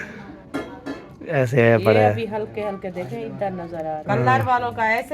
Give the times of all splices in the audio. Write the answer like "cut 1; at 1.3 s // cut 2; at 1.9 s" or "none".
cut 1; at 4.0 s